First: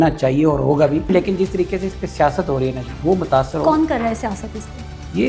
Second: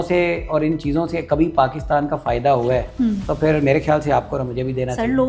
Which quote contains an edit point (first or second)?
first